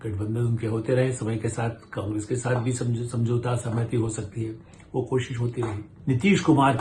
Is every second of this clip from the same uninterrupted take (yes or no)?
no